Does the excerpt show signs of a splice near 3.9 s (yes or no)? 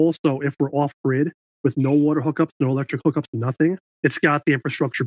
yes